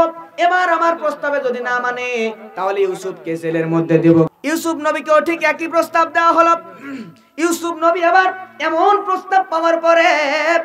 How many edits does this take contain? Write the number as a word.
one